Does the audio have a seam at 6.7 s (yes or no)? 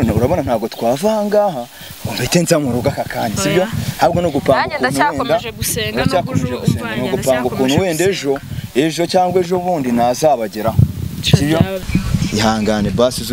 no